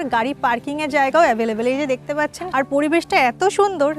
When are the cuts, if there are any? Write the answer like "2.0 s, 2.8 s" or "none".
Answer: 2.4 s